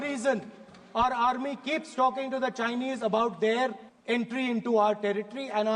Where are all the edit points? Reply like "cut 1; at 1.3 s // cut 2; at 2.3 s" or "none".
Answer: cut 1; at 3.9 s

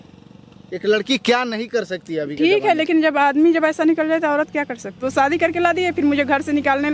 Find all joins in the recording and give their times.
cut 1; at 5.0 s

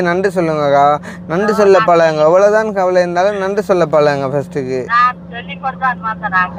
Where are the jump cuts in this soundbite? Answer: none

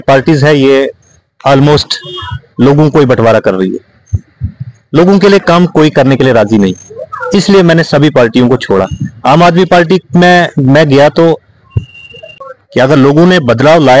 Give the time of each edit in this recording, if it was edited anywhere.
cut 1; at 12.4 s

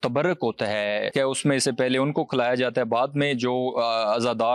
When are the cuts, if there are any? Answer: cut 1; at 1.1 s

